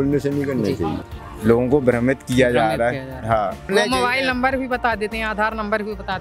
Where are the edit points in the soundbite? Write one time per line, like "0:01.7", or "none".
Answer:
0:01.0
0:03.7